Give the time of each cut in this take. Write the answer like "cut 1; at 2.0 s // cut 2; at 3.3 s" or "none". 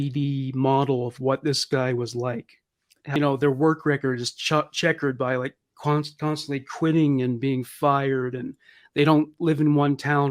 cut 1; at 3.2 s

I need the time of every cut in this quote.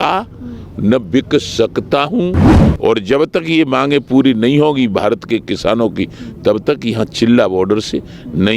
cut 1; at 2.5 s

